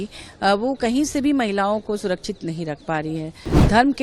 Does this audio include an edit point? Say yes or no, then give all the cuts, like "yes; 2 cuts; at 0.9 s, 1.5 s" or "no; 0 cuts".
no; 0 cuts